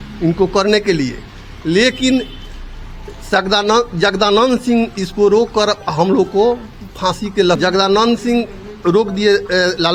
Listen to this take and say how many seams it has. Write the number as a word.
zero